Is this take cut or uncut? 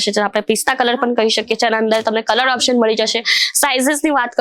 uncut